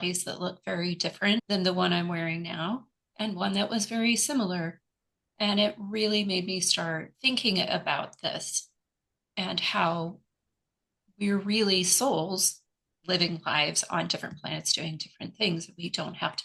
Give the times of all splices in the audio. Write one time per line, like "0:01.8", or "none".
0:01.5
0:07.1